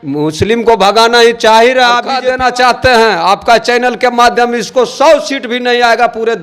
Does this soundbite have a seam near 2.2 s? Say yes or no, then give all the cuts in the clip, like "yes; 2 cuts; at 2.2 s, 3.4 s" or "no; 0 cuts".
yes; 1 cut; at 2.2 s